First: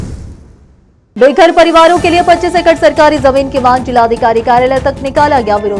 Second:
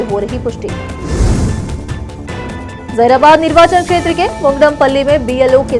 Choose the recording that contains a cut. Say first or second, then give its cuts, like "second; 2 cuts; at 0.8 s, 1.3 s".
first; 1 cut; at 1.1 s